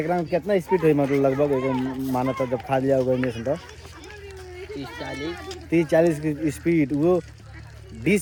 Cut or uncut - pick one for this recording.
uncut